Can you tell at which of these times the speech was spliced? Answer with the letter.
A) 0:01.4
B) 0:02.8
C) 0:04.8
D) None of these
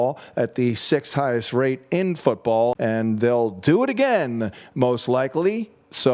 B